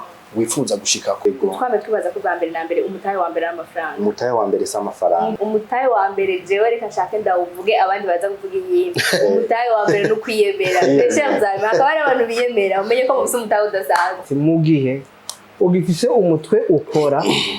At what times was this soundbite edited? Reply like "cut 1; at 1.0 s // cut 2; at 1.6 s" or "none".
cut 1; at 1.2 s // cut 2; at 5.3 s // cut 3; at 14.3 s